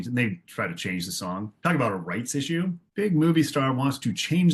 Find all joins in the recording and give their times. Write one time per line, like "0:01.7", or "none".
0:02.8